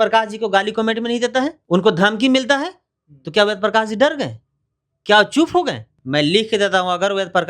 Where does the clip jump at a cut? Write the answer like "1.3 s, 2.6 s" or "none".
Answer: 1.6 s, 5.9 s